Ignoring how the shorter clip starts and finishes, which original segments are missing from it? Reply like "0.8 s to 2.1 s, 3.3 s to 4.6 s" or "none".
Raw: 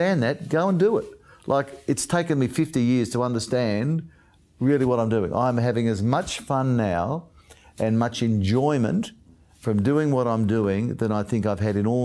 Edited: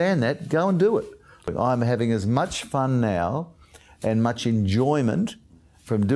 1.5 s to 5.2 s